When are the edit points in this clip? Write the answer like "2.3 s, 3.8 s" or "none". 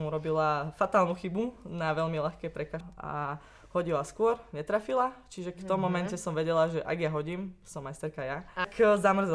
2.9 s, 8.6 s